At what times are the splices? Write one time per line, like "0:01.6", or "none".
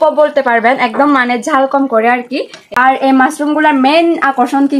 0:02.6